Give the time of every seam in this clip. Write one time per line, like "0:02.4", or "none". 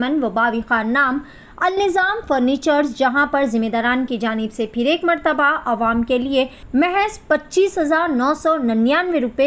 0:06.6